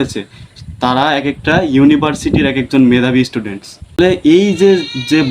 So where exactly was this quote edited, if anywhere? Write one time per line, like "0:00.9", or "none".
0:03.9